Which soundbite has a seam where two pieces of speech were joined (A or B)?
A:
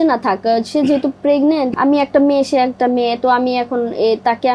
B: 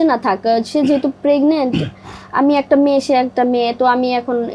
A